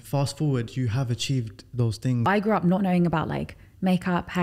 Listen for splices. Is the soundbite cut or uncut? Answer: cut